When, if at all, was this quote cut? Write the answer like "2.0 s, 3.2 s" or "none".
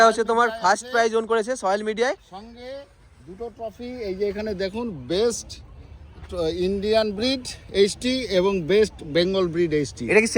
none